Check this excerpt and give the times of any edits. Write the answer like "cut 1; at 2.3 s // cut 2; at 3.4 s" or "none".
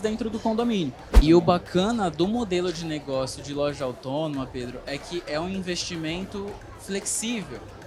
cut 1; at 1.1 s